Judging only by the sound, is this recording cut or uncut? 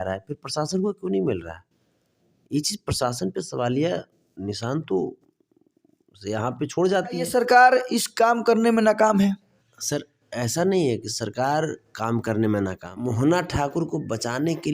cut